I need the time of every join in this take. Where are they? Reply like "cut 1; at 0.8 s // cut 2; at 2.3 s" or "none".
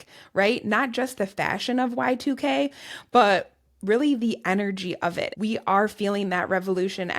cut 1; at 5.3 s